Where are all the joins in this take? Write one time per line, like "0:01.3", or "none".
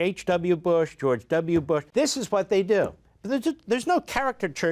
0:01.9